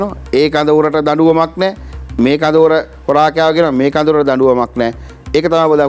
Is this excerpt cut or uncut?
uncut